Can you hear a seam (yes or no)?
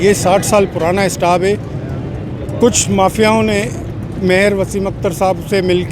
no